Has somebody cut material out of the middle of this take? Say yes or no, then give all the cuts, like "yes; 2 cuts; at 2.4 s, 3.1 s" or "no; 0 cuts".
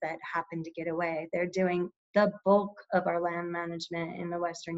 no; 0 cuts